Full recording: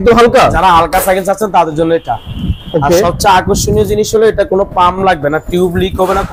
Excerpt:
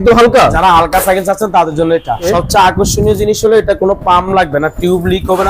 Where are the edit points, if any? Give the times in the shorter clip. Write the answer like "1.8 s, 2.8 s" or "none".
2.3 s